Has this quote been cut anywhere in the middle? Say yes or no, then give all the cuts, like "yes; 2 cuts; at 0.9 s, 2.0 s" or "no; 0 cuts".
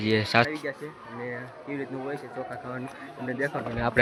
no; 0 cuts